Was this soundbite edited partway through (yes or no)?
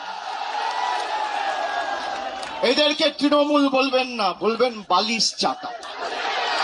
no